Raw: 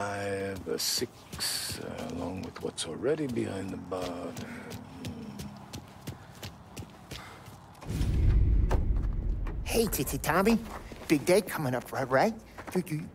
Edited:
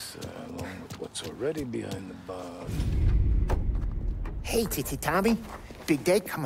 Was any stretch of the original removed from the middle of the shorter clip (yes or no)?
yes